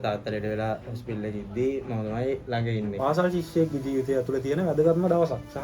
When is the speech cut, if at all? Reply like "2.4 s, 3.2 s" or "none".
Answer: 3.0 s